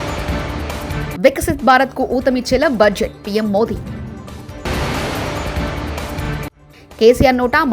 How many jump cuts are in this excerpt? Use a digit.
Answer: 1